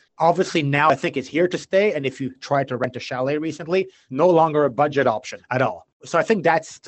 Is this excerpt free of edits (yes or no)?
yes